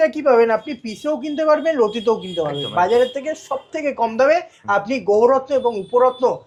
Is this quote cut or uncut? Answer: uncut